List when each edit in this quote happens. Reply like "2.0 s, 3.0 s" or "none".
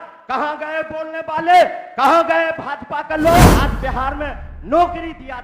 3.6 s